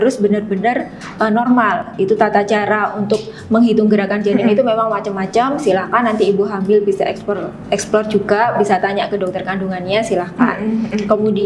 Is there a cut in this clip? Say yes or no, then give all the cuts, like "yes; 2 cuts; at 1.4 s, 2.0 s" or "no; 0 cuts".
no; 0 cuts